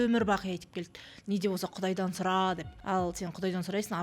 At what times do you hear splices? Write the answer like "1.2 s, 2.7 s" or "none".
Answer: 2.7 s